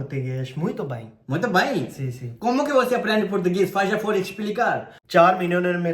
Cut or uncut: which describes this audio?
cut